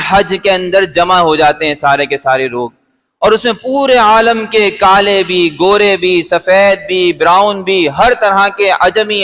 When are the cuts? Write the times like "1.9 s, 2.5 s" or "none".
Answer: none